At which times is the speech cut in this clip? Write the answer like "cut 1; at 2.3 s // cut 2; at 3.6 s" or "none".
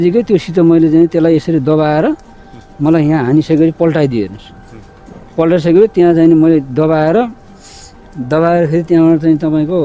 none